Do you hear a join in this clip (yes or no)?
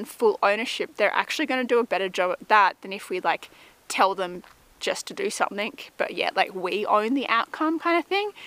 no